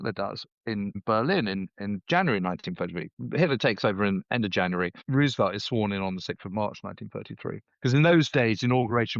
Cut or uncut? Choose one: cut